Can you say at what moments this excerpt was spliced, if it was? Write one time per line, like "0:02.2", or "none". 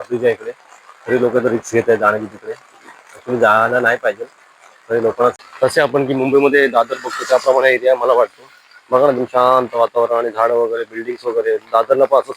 0:05.4